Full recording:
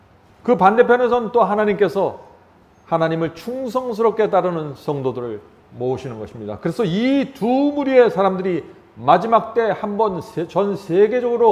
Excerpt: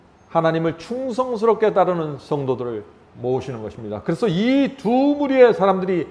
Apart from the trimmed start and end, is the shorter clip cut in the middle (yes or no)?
no